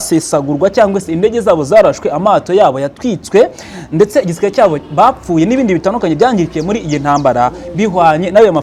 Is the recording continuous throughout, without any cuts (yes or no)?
yes